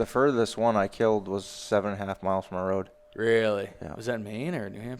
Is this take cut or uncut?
cut